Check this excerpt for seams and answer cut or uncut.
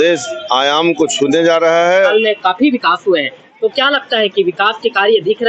cut